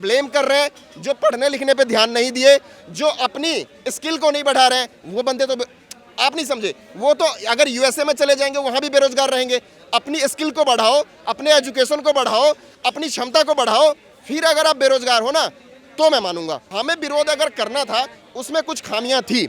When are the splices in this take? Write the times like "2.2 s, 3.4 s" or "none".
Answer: 16.7 s

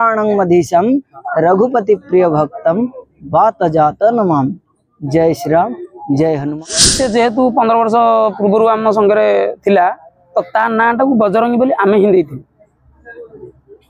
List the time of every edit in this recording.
6.9 s

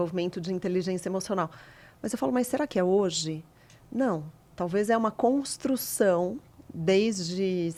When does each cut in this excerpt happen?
none

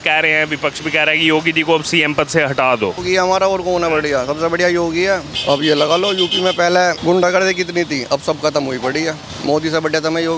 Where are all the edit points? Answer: 3.0 s, 5.3 s, 7.0 s, 9.3 s

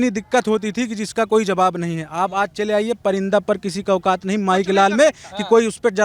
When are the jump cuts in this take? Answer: none

